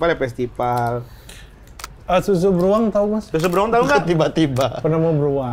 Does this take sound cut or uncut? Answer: uncut